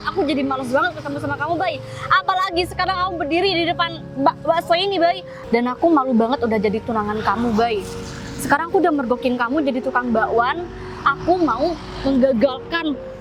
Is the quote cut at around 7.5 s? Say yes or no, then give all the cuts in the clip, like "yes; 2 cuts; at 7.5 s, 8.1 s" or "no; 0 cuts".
no; 0 cuts